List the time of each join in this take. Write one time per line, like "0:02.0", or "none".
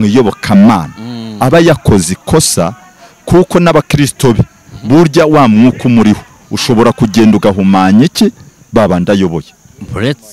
none